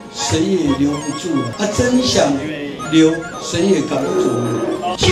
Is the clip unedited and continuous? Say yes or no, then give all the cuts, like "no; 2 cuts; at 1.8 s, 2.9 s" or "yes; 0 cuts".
no; 2 cuts; at 1.5 s, 3.3 s